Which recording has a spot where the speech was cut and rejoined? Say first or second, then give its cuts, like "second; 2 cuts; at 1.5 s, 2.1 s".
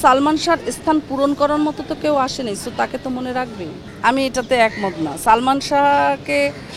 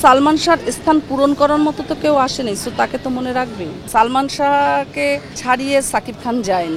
second; 2 cuts; at 3.8 s, 5.3 s